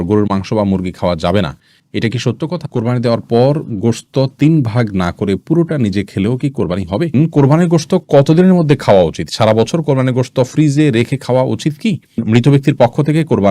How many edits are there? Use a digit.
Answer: 3